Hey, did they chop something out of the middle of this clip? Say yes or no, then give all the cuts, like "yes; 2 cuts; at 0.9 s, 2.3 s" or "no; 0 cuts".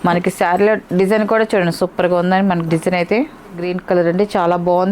yes; 1 cut; at 3.7 s